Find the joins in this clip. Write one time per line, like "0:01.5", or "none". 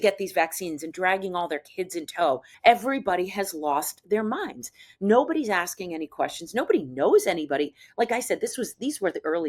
0:02.5